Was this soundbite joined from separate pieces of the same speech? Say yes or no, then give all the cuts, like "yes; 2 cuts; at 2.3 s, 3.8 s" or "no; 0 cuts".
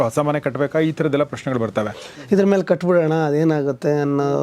yes; 1 cut; at 2.1 s